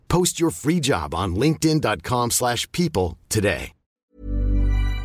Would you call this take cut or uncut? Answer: cut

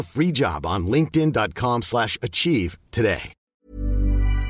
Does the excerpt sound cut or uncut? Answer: cut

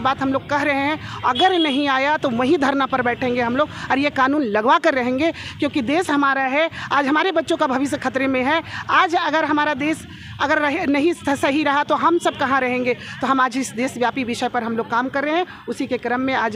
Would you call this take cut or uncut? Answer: uncut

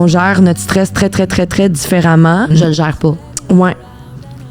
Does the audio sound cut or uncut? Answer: cut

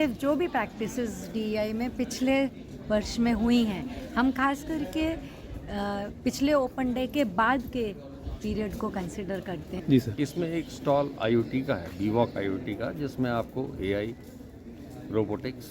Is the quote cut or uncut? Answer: cut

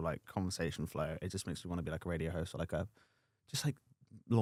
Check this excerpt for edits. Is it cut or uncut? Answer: uncut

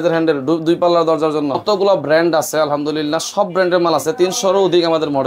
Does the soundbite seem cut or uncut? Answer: cut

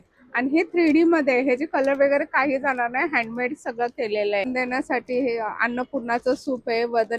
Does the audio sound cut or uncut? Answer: cut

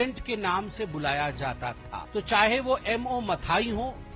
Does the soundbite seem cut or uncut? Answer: cut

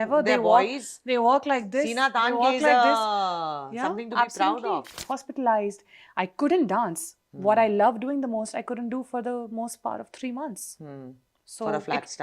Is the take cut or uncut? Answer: cut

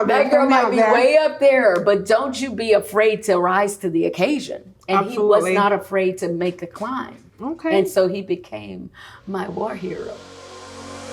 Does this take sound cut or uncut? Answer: cut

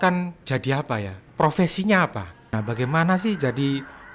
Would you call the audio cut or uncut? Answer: cut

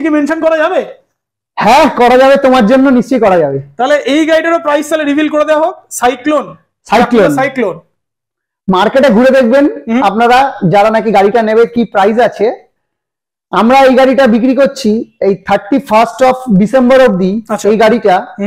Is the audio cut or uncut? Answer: uncut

